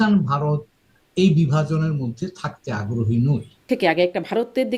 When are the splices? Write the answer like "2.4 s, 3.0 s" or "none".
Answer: 3.6 s